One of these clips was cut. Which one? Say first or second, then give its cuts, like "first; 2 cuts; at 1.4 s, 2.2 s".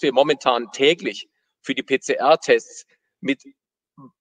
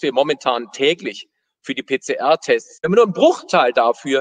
second; 1 cut; at 2.7 s